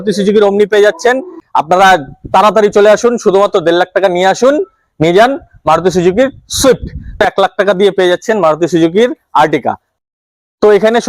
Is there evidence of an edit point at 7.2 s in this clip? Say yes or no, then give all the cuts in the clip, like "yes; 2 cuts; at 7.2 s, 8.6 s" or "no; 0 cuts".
yes; 3 cuts; at 1.4 s, 7.2 s, 9.9 s